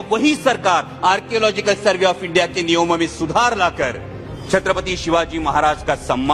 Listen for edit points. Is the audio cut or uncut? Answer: uncut